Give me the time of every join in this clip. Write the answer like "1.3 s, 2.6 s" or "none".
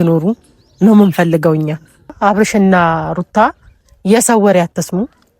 2.1 s